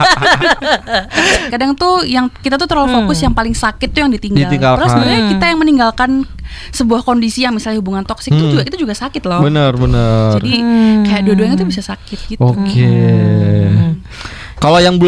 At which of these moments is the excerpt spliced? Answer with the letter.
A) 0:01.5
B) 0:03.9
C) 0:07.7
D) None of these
A